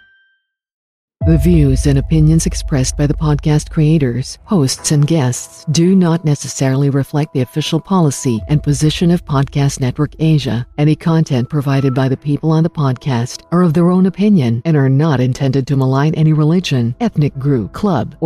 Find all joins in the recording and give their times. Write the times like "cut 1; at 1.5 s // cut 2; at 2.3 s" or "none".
cut 1; at 1.0 s